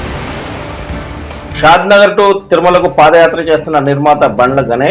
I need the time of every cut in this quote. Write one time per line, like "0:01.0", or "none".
0:01.5